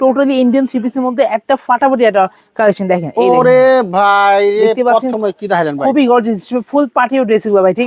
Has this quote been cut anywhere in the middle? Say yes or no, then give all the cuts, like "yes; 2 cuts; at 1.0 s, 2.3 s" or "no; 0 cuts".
no; 0 cuts